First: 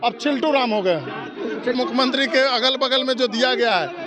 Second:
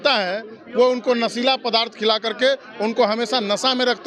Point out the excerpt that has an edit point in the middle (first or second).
first